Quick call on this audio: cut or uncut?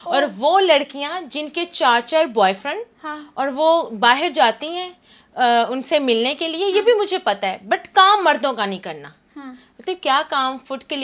uncut